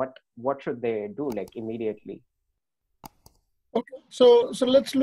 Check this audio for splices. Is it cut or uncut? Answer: uncut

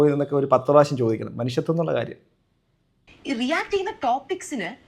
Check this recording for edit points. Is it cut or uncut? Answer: cut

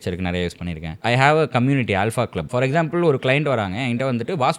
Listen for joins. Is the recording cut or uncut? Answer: cut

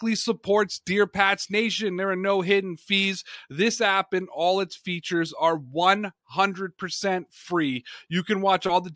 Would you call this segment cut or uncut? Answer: uncut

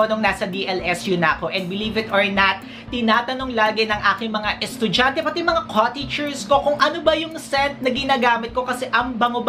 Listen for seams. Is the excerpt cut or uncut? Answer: uncut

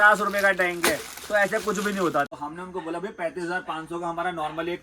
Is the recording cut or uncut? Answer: cut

